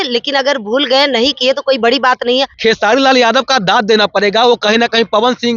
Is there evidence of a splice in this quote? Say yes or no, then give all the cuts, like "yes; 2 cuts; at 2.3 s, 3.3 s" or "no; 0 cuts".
yes; 1 cut; at 2.5 s